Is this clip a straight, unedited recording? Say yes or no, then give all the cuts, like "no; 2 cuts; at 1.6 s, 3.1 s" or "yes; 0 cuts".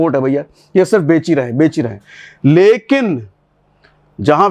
yes; 0 cuts